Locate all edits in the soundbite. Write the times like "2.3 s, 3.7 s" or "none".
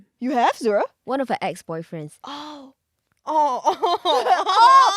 1.0 s